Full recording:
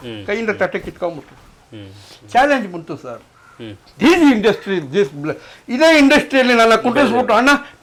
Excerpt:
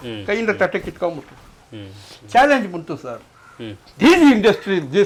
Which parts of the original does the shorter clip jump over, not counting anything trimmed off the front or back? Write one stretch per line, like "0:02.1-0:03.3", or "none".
none